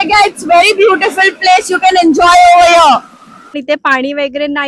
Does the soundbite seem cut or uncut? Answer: cut